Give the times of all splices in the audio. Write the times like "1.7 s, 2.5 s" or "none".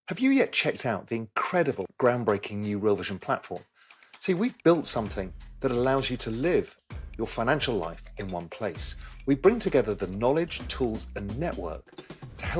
none

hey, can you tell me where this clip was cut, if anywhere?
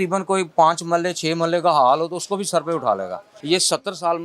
3.3 s

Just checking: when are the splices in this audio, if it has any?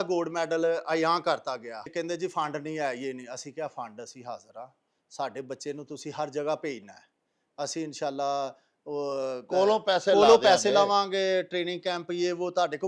1.9 s

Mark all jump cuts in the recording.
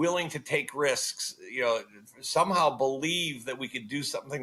none

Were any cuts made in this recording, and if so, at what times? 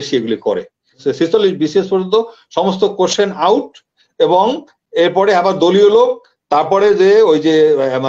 0.9 s

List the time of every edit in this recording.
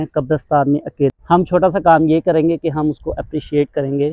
1.1 s

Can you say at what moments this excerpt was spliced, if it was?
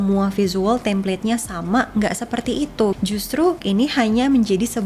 3.6 s

